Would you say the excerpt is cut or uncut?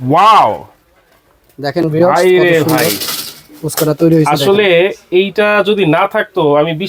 uncut